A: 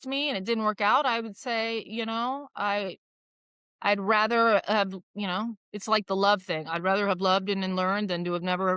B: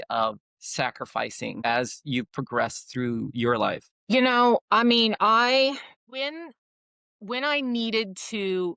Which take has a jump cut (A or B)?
B